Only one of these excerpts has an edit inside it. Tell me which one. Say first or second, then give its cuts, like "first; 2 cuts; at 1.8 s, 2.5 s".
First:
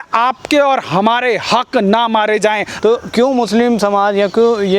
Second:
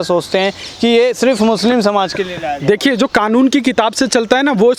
first; 1 cut; at 2.7 s